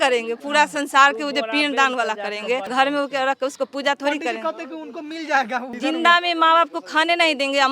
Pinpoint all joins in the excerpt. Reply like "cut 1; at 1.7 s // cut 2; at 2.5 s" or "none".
cut 1; at 2.7 s // cut 2; at 5.7 s